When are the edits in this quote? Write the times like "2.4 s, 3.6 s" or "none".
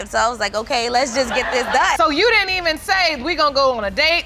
none